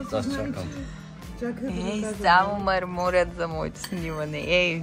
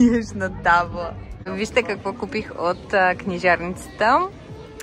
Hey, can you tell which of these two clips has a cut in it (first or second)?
second